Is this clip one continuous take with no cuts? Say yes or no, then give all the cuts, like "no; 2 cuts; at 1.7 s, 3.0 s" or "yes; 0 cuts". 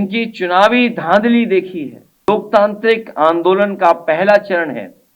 no; 1 cut; at 2.3 s